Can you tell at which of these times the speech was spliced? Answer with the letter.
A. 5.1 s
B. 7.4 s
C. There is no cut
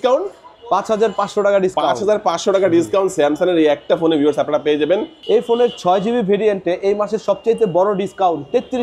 A